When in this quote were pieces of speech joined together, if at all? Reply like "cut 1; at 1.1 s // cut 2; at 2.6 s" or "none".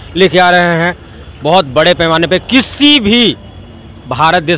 none